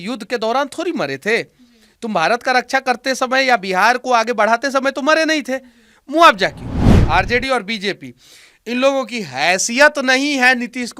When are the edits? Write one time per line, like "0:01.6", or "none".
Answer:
0:06.9